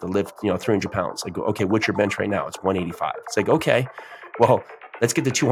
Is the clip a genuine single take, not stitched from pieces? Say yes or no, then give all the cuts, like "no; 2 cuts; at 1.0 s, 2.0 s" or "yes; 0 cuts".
yes; 0 cuts